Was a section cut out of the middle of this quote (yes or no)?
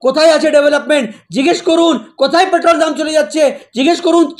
no